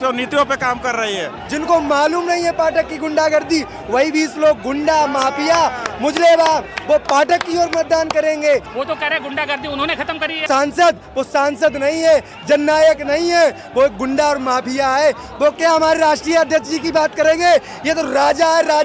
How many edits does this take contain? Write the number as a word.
three